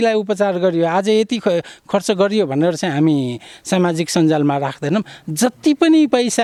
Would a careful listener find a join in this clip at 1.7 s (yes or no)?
no